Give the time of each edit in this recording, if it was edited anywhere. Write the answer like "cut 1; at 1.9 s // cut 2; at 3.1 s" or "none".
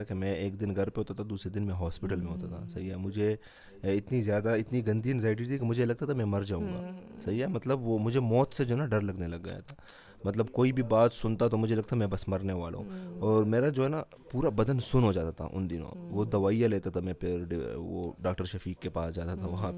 none